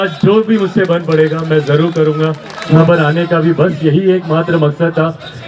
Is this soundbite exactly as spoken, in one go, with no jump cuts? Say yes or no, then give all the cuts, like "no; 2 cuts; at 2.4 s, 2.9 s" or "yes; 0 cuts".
no; 1 cut; at 2.8 s